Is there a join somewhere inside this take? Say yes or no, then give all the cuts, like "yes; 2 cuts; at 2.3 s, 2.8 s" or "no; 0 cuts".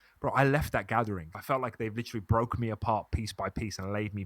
yes; 1 cut; at 1.4 s